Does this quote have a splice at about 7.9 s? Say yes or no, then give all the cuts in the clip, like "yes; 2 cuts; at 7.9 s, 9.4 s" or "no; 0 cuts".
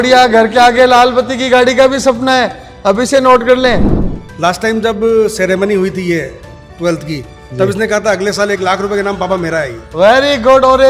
no; 1 cut; at 4.0 s